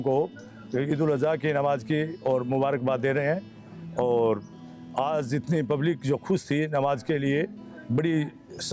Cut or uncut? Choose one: uncut